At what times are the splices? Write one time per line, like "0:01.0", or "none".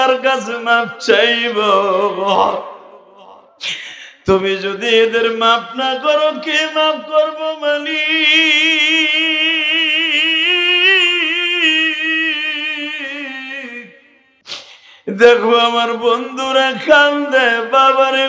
0:14.7